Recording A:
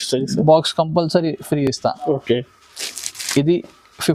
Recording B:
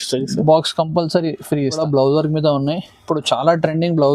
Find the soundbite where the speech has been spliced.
B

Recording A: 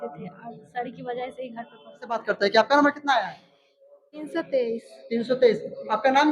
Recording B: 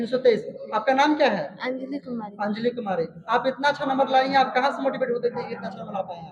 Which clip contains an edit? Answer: A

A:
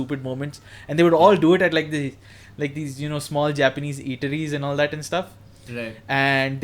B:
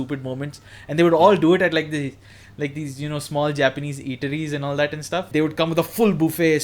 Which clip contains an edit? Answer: B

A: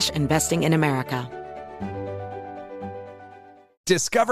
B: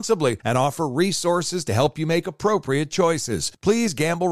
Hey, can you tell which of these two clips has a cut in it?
A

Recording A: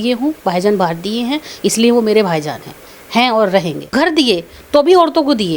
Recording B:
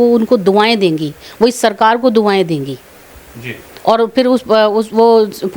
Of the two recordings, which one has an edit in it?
A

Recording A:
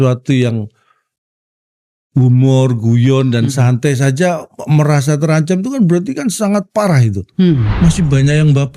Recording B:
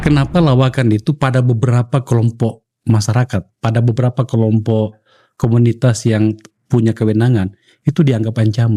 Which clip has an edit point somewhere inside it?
A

